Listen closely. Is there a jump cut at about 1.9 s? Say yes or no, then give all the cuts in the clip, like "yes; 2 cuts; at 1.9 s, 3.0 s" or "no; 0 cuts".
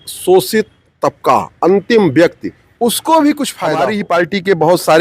no; 1 cut; at 3.7 s